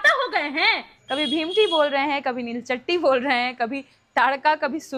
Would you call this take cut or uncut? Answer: cut